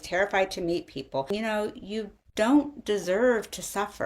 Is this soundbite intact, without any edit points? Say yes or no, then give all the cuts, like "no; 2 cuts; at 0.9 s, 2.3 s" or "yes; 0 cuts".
no; 1 cut; at 1.3 s